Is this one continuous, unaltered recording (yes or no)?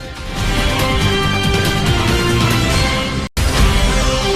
no